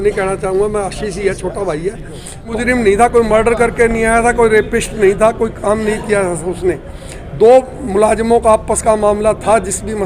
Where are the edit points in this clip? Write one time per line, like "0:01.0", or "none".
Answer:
0:02.5

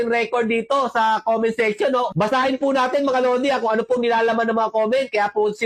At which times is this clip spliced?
none

